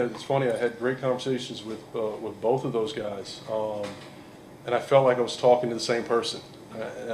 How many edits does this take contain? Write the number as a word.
zero